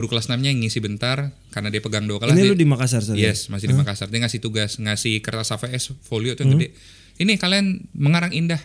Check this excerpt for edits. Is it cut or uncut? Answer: uncut